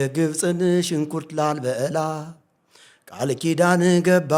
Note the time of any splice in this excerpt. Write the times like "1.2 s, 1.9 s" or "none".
none

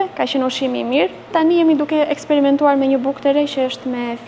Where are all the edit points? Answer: 1.3 s

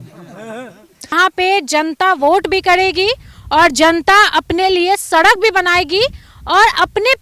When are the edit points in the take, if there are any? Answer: 1.1 s

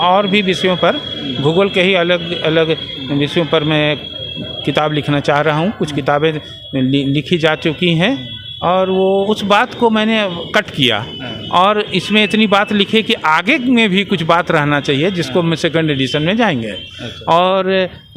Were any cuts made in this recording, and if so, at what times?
9.3 s

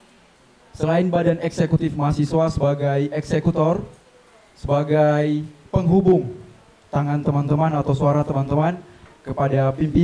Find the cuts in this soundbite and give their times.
5.6 s

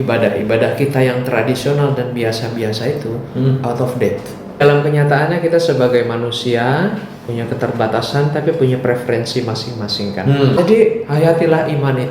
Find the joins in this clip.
4.6 s, 10.6 s

